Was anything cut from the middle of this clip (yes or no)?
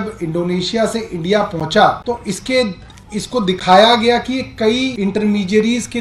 yes